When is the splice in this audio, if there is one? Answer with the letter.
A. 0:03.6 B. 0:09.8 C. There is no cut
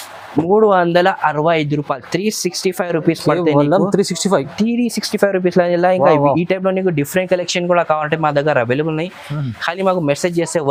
C